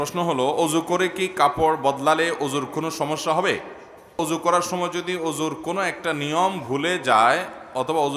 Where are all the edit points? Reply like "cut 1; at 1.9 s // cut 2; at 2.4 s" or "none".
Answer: cut 1; at 4.0 s